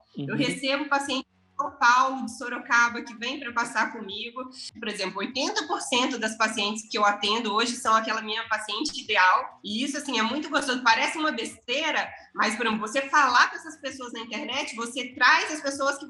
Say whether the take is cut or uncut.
cut